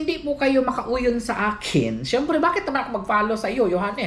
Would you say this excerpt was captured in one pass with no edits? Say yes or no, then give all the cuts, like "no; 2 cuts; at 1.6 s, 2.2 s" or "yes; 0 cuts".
yes; 0 cuts